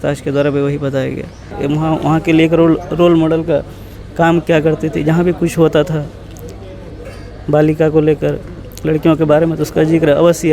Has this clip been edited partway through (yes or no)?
yes